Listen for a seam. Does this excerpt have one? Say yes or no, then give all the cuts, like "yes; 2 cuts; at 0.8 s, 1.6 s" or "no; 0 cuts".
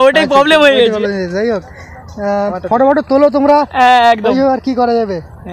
no; 0 cuts